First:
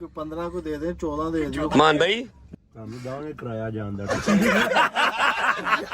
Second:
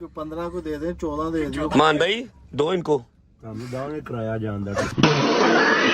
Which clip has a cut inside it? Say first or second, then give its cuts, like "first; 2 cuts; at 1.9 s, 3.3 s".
first; 2 cuts; at 2.4 s, 4.3 s